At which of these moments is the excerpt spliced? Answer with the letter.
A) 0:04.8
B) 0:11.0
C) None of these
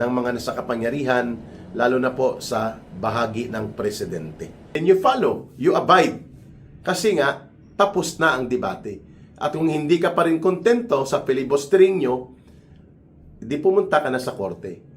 A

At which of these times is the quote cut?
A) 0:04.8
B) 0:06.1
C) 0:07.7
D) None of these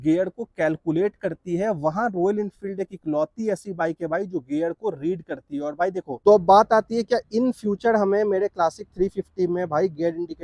B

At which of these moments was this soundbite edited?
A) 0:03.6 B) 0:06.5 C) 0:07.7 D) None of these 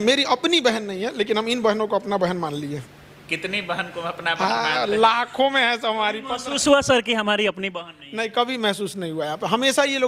D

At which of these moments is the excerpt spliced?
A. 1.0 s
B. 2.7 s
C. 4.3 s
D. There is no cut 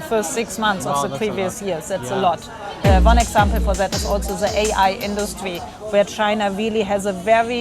B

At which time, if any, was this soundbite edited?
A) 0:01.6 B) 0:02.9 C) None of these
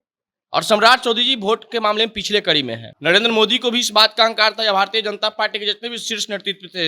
B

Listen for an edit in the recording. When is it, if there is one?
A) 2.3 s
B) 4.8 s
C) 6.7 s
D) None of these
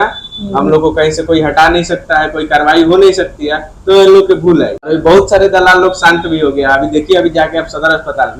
B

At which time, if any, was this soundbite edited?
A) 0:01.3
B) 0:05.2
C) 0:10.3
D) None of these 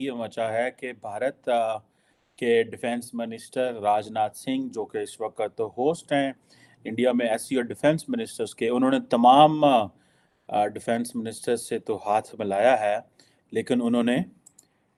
D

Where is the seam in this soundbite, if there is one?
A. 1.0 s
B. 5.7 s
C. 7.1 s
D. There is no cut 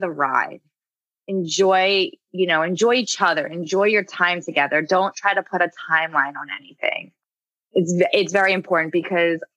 C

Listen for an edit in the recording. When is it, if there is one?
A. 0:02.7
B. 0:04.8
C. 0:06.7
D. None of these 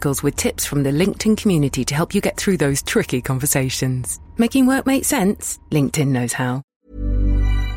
C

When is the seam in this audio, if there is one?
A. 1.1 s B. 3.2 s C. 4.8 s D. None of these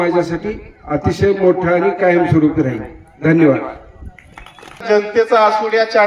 C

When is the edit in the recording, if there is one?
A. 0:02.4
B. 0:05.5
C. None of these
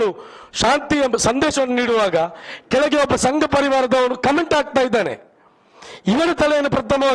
C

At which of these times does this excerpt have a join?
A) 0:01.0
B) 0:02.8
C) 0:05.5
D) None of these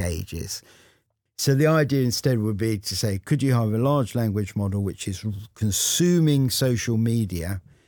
A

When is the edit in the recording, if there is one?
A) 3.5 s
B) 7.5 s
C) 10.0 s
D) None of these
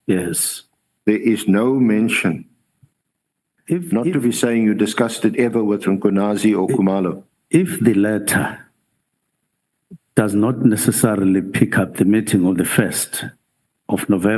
A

